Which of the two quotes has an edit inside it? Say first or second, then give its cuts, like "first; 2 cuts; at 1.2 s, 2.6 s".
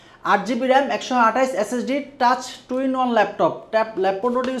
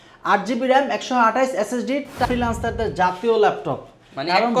second; 1 cut; at 2.2 s